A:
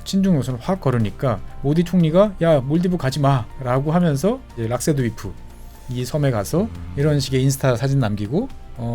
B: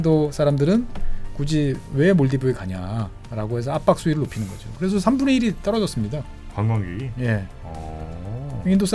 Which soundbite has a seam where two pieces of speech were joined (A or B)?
A